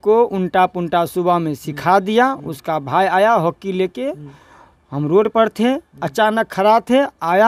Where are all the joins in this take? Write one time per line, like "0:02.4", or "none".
none